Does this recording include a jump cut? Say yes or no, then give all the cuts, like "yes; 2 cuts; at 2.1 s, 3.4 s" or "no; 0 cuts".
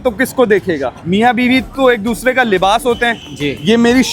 yes; 1 cut; at 1.0 s